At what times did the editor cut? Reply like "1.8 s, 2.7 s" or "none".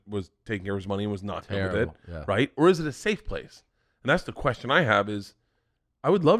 none